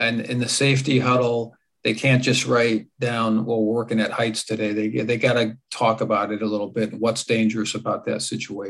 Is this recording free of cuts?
yes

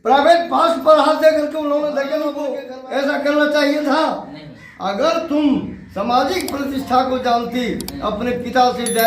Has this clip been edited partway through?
yes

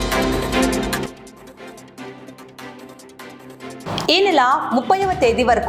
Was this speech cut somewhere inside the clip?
yes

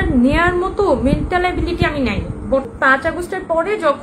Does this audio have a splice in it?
yes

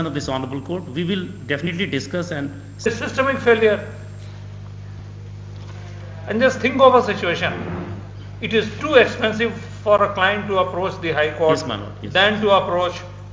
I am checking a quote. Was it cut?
yes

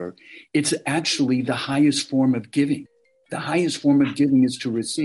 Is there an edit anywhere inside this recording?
no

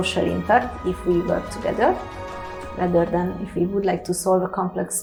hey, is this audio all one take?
yes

